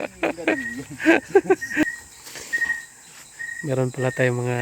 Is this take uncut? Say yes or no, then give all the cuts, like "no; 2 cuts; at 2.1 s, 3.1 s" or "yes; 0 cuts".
no; 1 cut; at 1.8 s